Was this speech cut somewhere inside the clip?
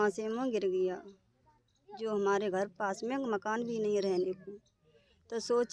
no; 0 cuts

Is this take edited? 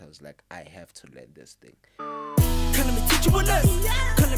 yes; 1 cut; at 2.0 s

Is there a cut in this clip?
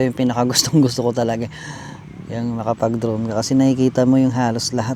no; 0 cuts

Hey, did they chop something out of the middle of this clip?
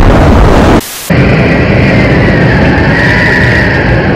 no; 0 cuts

